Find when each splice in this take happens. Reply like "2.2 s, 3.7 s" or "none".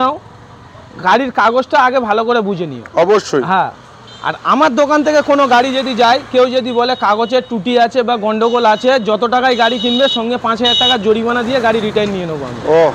none